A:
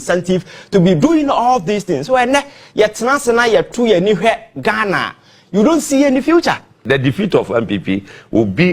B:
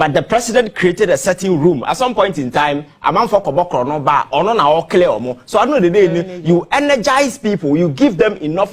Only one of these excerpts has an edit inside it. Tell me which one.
A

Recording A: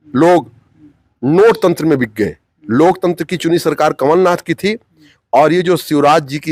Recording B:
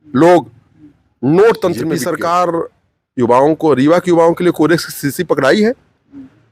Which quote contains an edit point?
B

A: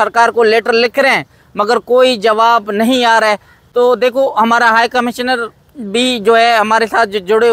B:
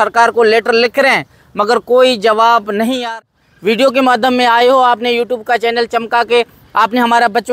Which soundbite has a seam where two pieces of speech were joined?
B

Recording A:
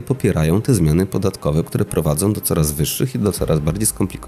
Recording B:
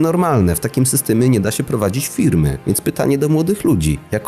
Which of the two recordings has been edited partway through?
B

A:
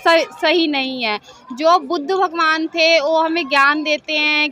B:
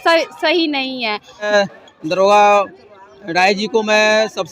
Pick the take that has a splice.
B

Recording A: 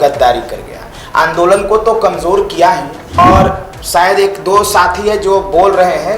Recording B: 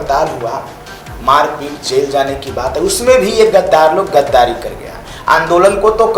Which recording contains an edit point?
A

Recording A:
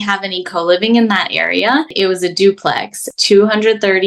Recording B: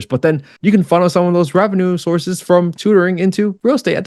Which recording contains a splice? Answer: A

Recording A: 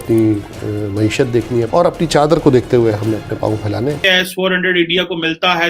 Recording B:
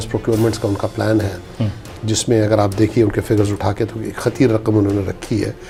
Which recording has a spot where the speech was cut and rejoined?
A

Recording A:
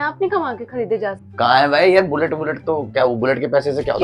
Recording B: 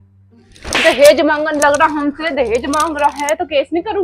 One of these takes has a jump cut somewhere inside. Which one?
A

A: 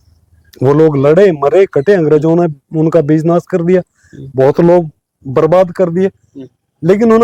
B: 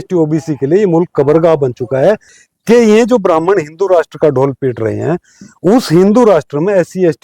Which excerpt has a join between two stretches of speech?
B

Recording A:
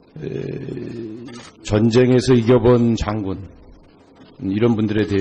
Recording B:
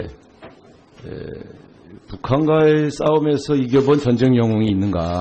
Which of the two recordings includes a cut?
A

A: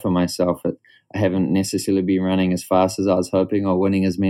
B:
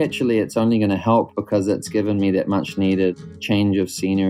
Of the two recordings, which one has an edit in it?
B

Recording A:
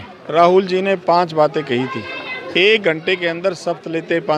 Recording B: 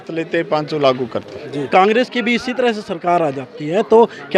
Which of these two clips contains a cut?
B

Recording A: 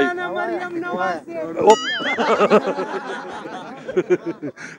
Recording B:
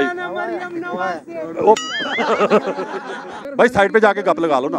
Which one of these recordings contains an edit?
B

